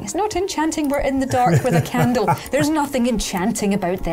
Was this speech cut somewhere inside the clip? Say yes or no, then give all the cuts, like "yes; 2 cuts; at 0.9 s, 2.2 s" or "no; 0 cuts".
no; 0 cuts